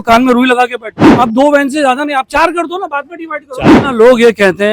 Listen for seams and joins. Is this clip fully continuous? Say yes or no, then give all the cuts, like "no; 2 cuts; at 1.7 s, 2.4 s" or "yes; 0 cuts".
no; 2 cuts; at 0.9 s, 3.7 s